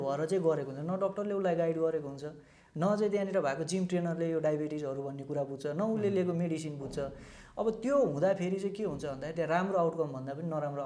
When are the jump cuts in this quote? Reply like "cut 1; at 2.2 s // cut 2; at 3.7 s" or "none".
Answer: none